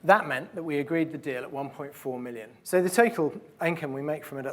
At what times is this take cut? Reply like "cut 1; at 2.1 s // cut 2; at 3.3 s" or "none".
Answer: cut 1; at 2.5 s

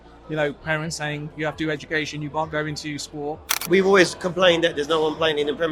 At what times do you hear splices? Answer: cut 1; at 3.5 s

